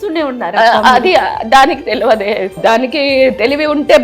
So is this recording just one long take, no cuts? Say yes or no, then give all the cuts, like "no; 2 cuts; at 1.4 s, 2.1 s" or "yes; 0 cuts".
no; 1 cut; at 2.6 s